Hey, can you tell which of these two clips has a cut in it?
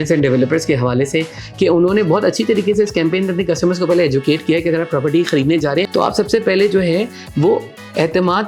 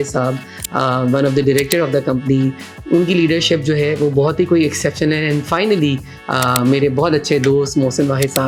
first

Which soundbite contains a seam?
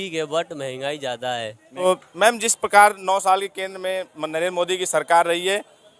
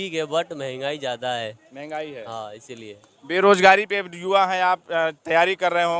first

